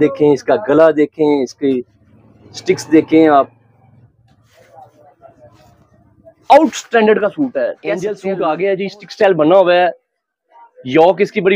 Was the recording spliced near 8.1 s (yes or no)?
yes